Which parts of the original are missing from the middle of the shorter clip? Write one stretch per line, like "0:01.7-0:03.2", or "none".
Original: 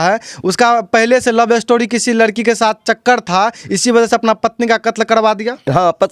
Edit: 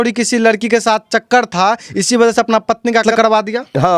0:04.8-0:05.0